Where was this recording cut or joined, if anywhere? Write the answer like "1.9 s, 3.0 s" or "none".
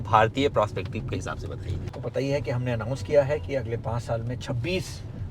2.0 s

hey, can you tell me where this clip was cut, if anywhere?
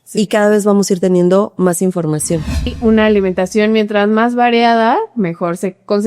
2.7 s

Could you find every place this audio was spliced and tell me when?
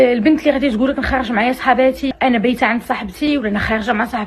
2.1 s, 3.3 s

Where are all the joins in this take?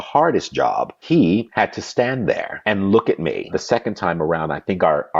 1.2 s, 2.5 s, 3.5 s

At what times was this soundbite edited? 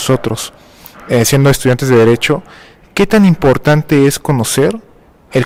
none

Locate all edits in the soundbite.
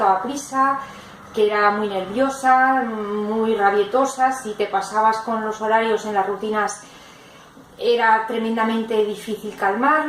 4.6 s

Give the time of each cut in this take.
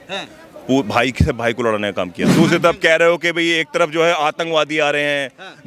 2.2 s

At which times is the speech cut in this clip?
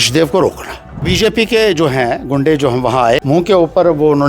1.1 s, 3.2 s

